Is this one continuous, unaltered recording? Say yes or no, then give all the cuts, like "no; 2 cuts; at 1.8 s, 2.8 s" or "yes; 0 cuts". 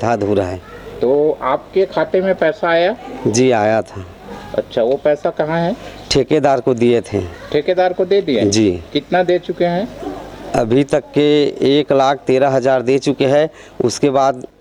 yes; 0 cuts